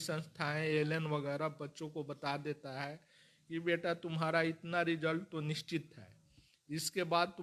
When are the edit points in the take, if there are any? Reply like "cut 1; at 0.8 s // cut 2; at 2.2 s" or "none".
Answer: none